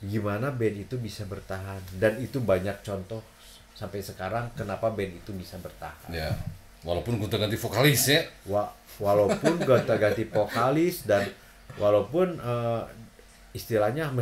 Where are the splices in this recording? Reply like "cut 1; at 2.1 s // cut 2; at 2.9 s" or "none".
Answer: none